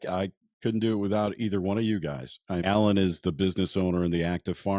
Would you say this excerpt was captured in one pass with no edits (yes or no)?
no